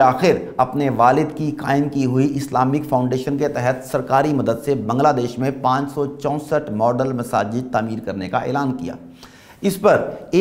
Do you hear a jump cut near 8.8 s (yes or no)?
no